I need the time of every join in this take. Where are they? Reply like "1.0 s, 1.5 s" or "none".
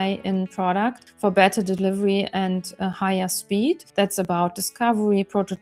1.1 s, 3.9 s